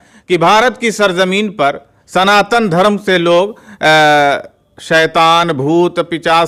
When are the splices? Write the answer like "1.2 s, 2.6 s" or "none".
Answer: none